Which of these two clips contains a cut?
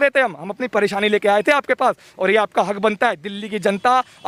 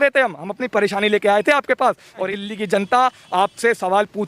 second; 1 cut; at 2.2 s

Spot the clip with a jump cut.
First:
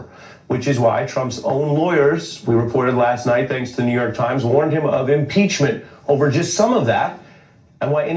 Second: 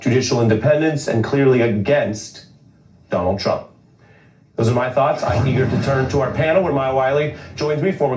first; 1 cut; at 2.8 s

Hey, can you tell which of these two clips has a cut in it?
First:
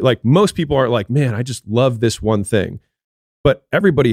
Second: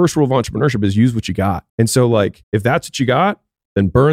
second; 2 cuts; at 1.7 s, 2.4 s

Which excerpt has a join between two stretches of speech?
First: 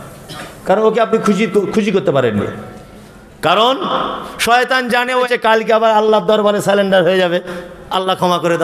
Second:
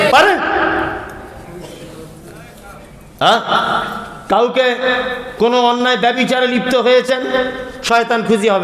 first; 1 cut; at 5.3 s

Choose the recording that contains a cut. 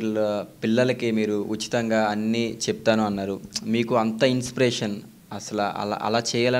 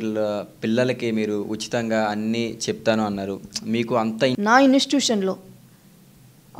second; 1 cut; at 4.4 s

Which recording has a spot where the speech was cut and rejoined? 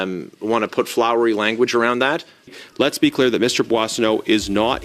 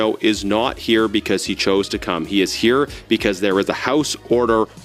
first; 1 cut; at 2.6 s

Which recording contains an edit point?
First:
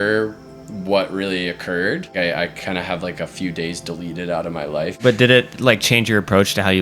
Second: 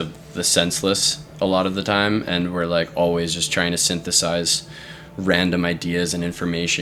first; 2 cuts; at 2.1 s, 5.0 s

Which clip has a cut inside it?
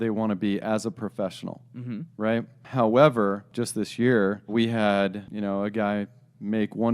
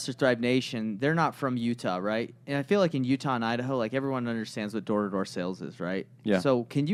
first; 4 cuts; at 2.7 s, 3.5 s, 4.5 s, 5.2 s

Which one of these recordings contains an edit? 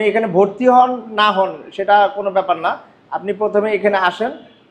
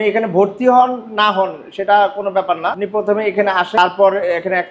second; 2 cuts; at 2.8 s, 3.8 s

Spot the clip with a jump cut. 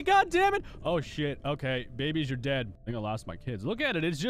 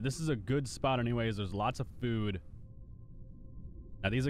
first; 1 cut; at 2.8 s

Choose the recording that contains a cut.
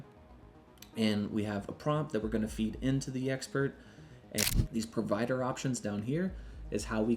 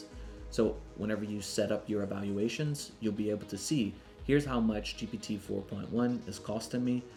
first; 1 cut; at 4.4 s

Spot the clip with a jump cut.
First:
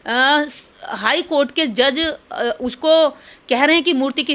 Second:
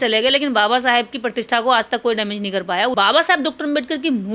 second; 1 cut; at 2.9 s

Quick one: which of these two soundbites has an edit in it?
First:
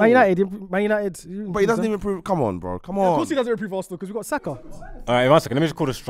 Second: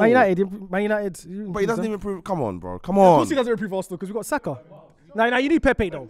first; 1 cut; at 5.0 s

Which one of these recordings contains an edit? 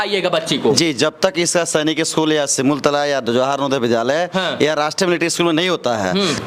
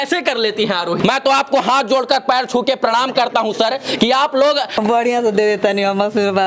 second; 2 cuts; at 1.0 s, 4.8 s

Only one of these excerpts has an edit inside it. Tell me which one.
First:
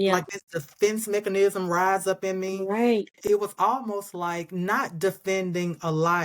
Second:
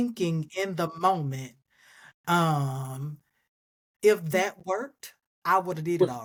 first; 1 cut; at 3.1 s

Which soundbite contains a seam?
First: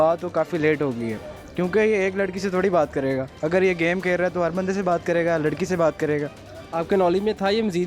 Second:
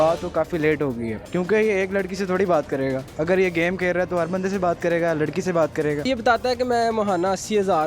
second; 2 cuts; at 1.2 s, 6.1 s

